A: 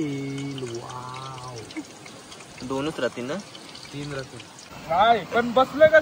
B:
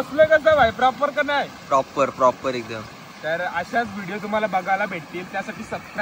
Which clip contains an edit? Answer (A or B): A